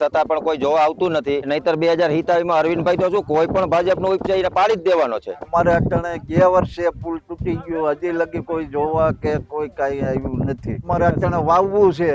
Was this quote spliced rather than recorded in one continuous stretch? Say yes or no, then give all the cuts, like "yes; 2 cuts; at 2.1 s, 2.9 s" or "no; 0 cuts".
yes; 3 cuts; at 1.5 s, 5.5 s, 10.8 s